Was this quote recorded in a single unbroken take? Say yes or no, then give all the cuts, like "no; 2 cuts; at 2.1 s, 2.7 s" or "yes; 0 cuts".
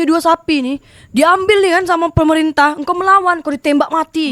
yes; 0 cuts